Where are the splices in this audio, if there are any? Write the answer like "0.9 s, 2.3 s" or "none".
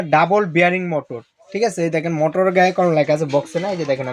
none